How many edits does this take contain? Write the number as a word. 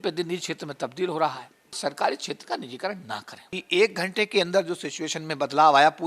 two